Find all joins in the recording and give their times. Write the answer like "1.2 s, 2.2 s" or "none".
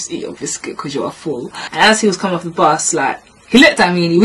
1.6 s